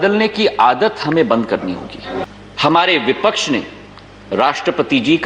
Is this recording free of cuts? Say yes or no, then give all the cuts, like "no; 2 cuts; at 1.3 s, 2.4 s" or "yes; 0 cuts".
no; 1 cut; at 2.2 s